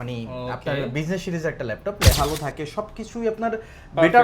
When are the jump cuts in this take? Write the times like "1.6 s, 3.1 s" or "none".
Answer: 2.1 s

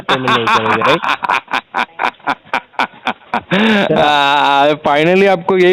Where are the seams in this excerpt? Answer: none

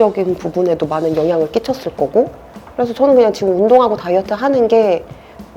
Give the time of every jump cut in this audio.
none

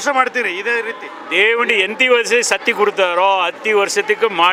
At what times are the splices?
none

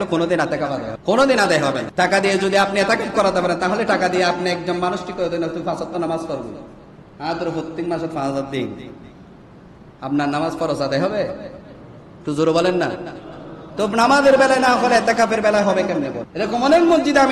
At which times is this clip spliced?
0.9 s, 1.8 s, 16.2 s

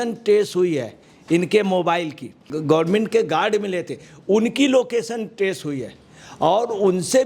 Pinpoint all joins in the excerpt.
2.5 s

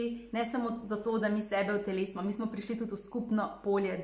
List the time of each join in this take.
none

